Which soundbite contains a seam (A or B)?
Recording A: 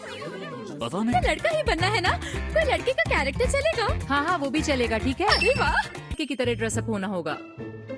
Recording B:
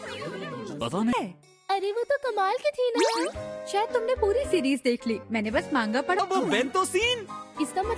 B